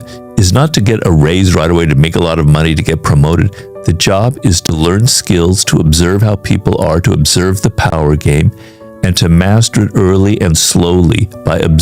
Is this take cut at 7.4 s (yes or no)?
no